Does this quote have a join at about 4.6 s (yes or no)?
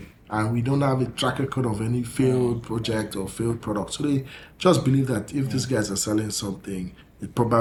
no